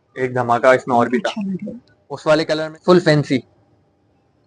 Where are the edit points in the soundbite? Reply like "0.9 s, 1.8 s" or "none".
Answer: 2.6 s